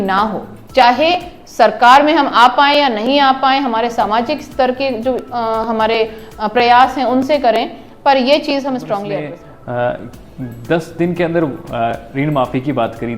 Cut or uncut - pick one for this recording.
cut